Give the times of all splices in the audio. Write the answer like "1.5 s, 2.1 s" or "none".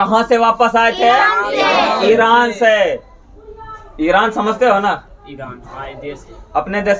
none